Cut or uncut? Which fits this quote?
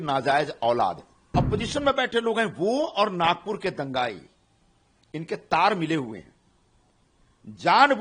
cut